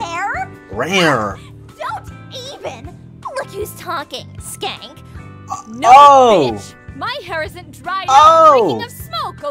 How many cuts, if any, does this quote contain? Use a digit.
0